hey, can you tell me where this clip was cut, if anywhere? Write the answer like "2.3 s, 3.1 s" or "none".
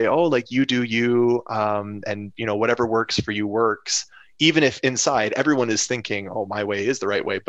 none